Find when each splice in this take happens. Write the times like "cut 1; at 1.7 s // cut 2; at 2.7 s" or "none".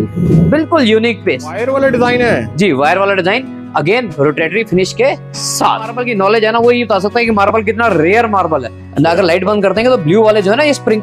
cut 1; at 1.6 s // cut 2; at 6.0 s // cut 3; at 8.8 s